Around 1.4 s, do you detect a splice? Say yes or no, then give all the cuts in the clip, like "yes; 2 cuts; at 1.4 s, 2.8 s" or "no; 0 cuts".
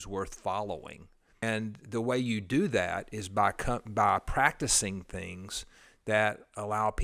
yes; 1 cut; at 1.4 s